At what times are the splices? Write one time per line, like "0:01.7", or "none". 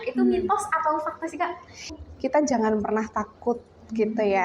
0:02.0

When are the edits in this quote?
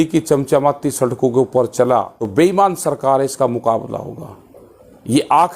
0:02.2

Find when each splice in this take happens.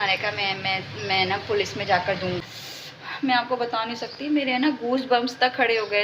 0:02.4

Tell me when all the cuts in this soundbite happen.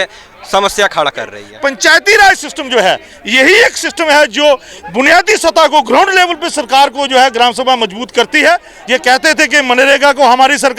0:01.4
0:08.7

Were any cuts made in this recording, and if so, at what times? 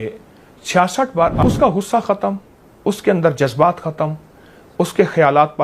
0:01.4

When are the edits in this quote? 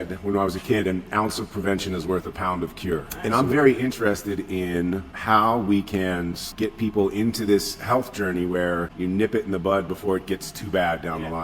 0:03.1
0:05.1
0:06.4

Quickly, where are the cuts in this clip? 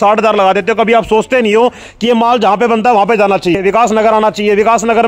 0:03.6

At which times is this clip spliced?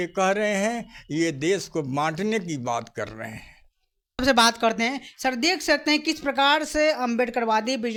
none

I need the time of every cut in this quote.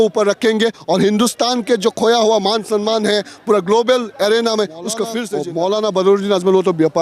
0:05.2

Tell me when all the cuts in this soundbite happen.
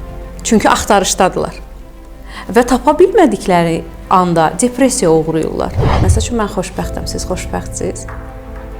0:05.8

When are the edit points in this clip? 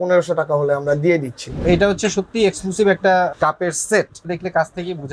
0:01.6
0:03.3
0:04.3

